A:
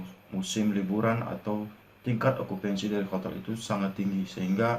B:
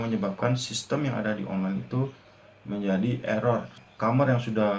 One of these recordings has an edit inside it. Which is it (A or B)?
B